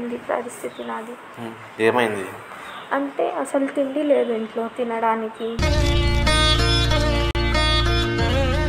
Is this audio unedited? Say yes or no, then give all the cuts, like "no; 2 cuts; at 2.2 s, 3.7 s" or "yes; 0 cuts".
no; 1 cut; at 1.2 s